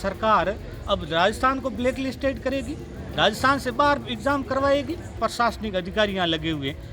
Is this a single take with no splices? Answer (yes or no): no